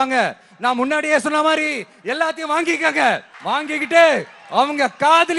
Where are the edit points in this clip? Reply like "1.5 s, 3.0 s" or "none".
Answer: 3.3 s